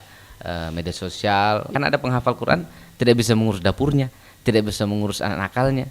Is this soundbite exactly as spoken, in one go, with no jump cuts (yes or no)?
no